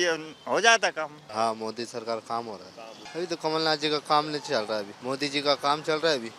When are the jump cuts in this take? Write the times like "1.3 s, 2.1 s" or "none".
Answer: 1.2 s, 3.0 s, 4.9 s